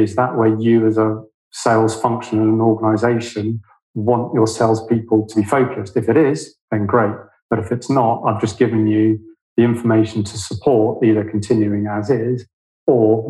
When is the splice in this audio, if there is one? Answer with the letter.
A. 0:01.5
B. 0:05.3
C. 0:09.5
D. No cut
B